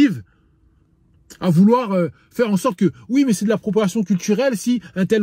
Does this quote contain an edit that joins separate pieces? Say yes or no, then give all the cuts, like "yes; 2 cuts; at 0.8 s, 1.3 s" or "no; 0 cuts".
no; 0 cuts